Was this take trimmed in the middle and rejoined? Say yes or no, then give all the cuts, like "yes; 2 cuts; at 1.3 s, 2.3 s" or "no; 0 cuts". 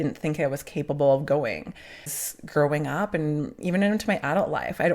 yes; 1 cut; at 2.1 s